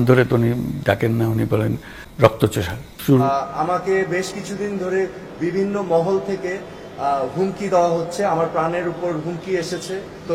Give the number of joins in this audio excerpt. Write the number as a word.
one